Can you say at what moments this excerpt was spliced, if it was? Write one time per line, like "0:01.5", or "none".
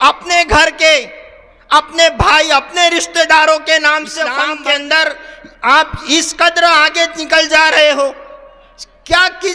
0:04.4